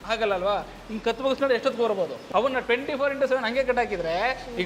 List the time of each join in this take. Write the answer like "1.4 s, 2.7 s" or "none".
2.2 s

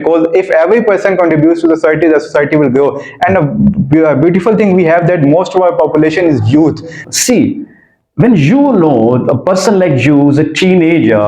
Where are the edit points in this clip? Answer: 6.9 s

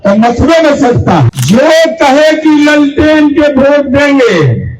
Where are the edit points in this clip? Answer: 1.3 s

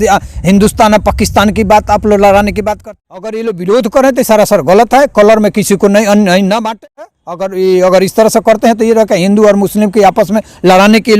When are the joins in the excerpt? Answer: 2.8 s, 6.7 s

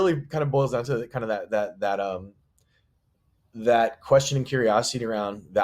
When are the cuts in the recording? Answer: none

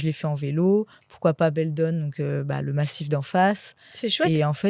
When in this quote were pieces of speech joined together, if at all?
none

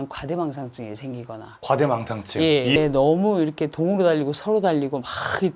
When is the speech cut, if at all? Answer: 2.8 s

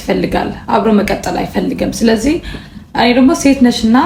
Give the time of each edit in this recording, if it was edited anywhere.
none

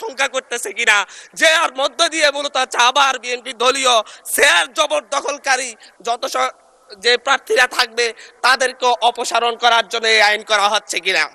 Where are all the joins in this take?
none

